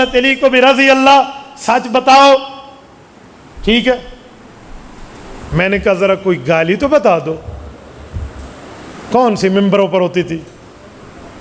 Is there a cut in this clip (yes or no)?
no